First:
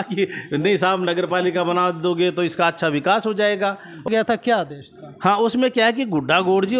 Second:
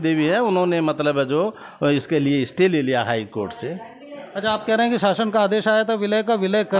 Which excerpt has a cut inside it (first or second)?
first